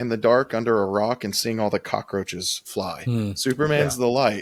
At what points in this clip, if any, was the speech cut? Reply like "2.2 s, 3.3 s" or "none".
none